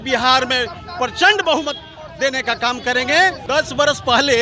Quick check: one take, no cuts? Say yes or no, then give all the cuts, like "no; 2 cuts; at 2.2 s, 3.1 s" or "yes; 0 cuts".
no; 1 cut; at 3.4 s